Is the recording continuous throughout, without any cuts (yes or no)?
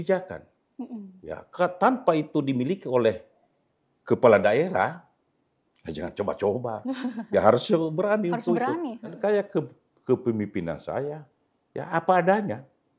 no